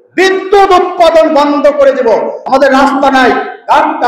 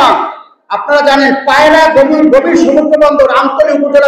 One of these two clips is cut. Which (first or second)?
first